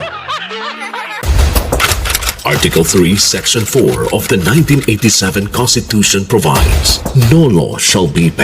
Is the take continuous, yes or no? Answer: no